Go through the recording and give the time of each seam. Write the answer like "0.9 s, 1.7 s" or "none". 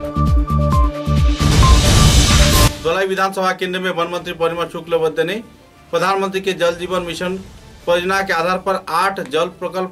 2.7 s